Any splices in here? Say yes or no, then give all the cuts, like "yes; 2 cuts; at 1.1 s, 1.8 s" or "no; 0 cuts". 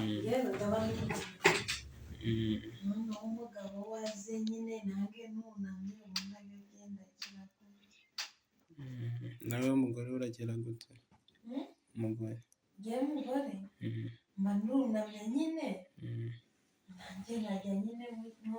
no; 0 cuts